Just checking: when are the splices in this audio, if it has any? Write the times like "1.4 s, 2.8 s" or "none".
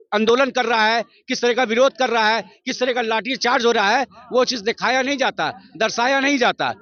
none